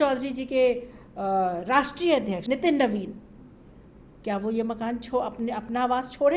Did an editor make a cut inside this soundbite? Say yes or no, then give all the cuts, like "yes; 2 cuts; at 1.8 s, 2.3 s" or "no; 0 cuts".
yes; 1 cut; at 2.4 s